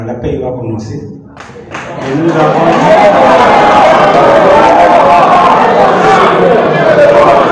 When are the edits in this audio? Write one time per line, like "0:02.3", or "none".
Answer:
none